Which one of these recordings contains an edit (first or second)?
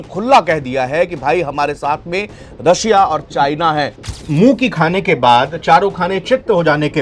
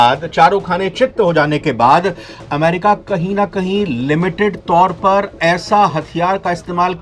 first